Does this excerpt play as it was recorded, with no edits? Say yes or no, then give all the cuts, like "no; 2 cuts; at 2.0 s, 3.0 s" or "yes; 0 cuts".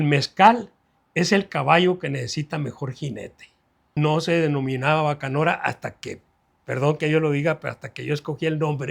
no; 1 cut; at 3.9 s